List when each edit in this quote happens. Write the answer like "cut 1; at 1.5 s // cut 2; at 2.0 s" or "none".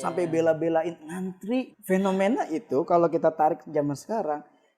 cut 1; at 1.7 s